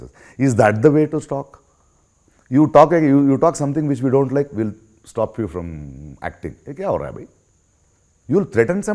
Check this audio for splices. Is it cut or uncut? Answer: uncut